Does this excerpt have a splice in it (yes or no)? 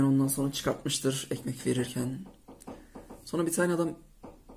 no